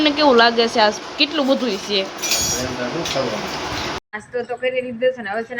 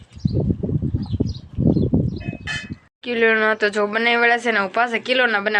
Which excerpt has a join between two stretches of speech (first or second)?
first